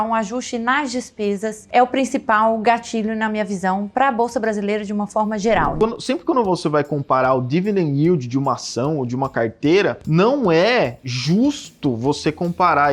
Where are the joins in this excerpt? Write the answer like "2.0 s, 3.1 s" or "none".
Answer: 1.6 s, 5.8 s, 10.0 s